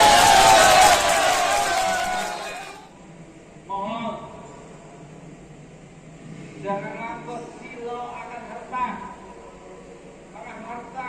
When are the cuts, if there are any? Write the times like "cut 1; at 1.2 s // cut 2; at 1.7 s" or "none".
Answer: cut 1; at 2.4 s